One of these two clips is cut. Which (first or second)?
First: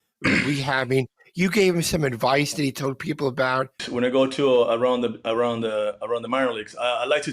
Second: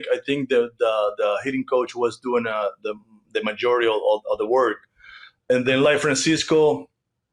first